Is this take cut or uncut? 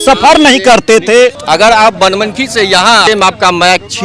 cut